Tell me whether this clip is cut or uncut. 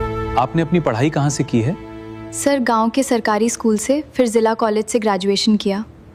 uncut